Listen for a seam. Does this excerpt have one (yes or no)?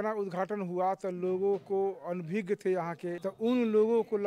yes